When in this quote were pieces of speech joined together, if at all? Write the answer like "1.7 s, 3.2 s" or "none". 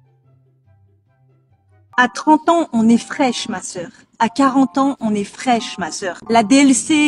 1.9 s